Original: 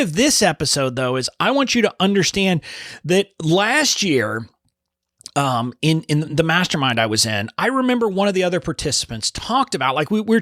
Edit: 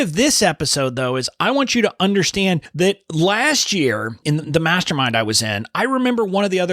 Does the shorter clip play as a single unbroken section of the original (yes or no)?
no